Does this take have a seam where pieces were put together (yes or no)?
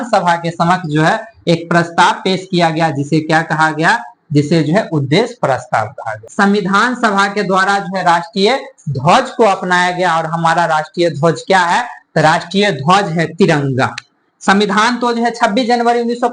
yes